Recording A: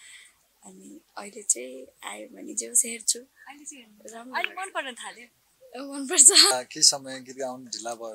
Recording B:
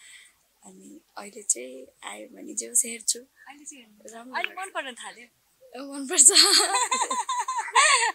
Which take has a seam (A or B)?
A